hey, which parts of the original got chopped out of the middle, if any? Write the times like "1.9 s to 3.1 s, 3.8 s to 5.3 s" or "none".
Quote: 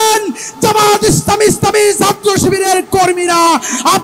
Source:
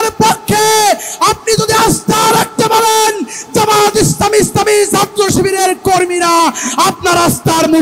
none